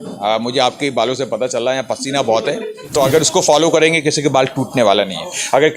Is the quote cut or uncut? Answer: cut